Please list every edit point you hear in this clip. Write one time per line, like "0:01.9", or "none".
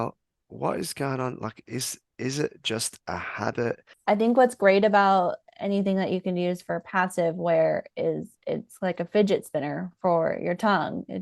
0:03.9